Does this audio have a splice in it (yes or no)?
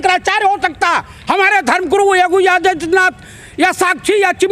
no